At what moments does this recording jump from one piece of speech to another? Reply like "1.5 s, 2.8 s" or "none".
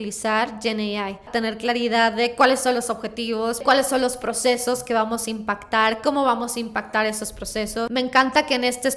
1.3 s, 3.6 s, 7.9 s